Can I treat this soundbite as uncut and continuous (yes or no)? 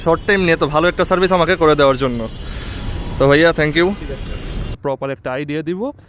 no